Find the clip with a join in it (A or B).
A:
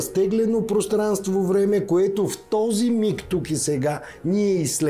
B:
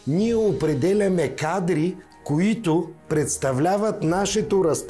B